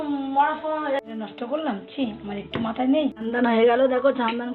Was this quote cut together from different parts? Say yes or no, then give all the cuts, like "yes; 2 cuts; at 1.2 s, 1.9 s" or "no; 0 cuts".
yes; 2 cuts; at 1.0 s, 3.2 s